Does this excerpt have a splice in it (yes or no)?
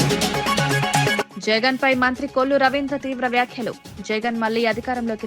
yes